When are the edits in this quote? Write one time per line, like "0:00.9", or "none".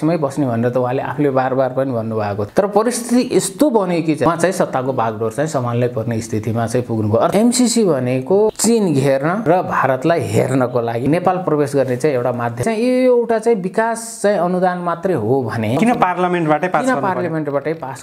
0:02.4
0:04.3
0:07.3
0:08.5
0:09.5
0:11.1
0:12.6
0:15.8